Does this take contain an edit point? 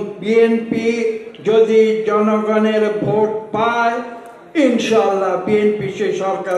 no; 0 cuts

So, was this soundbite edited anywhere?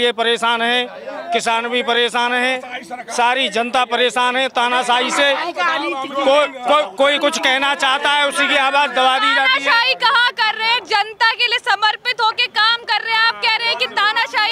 no; 0 cuts

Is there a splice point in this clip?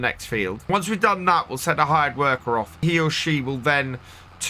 yes; 2 cuts; at 0.7 s, 2.8 s

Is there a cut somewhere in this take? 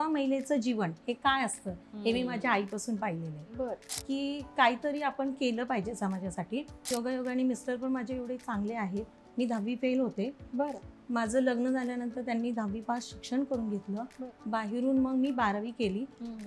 yes; 2 cuts; at 3.9 s, 6.9 s

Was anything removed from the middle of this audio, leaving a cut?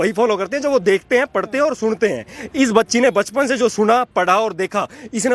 no; 0 cuts

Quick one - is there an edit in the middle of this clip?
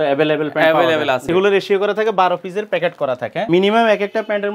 yes; 2 cuts; at 1.3 s, 3.4 s

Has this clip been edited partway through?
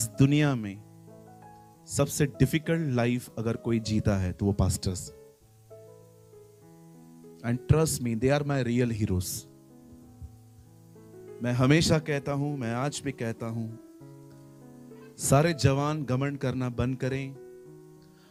no; 0 cuts

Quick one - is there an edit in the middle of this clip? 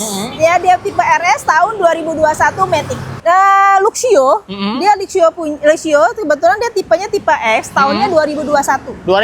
yes; 1 cut; at 3.0 s

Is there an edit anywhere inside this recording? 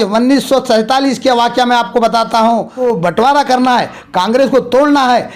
yes; 1 cut; at 2.8 s

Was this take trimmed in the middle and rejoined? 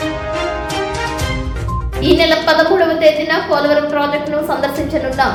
no; 0 cuts

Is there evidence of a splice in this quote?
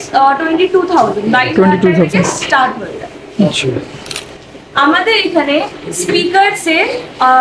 no; 0 cuts

